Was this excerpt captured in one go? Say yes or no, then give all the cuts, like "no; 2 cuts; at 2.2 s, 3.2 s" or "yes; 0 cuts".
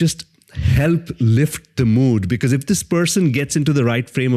yes; 0 cuts